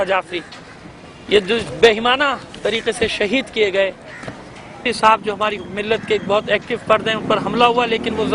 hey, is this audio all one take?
yes; 0 cuts

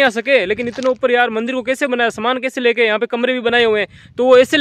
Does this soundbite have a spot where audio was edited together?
no; 0 cuts

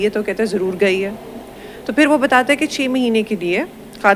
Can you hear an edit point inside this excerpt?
no; 0 cuts

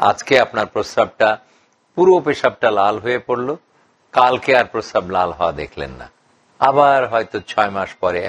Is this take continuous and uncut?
yes; 0 cuts

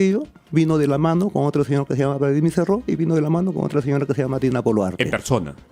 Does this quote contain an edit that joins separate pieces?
no; 0 cuts

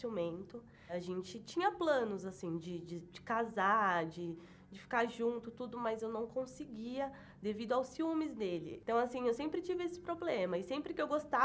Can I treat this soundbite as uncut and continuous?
no; 1 cut; at 0.9 s

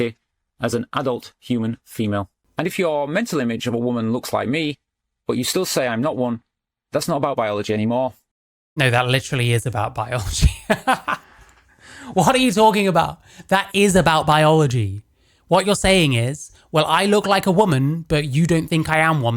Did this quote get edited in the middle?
yes; 1 cut; at 2.4 s

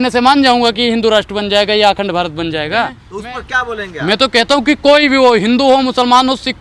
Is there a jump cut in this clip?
yes; 1 cut; at 3.1 s

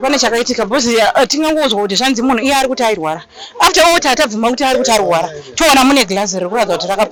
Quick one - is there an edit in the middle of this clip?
no; 0 cuts

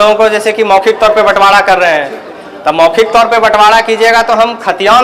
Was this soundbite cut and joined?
no; 0 cuts

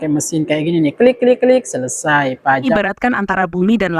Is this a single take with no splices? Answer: no; 1 cut; at 2.7 s

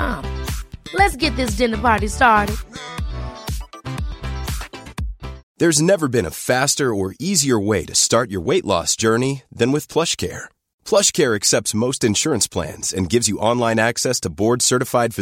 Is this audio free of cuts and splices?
no; 1 cut; at 5.4 s

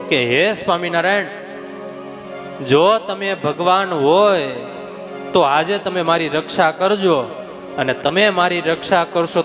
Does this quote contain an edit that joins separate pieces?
no; 0 cuts

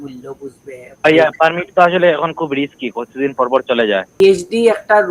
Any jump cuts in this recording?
yes; 2 cuts; at 1.0 s, 4.2 s

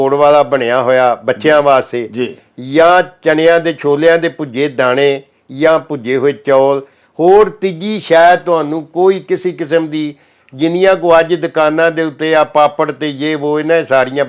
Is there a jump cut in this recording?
no; 0 cuts

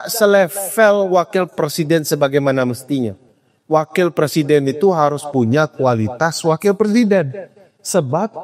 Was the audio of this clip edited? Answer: no; 0 cuts

